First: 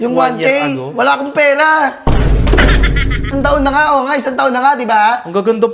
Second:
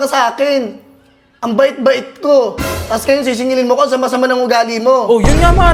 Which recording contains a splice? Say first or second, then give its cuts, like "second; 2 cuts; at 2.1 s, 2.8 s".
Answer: first; 1 cut; at 3.3 s